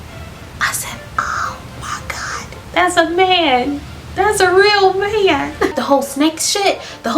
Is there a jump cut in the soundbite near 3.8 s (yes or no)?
no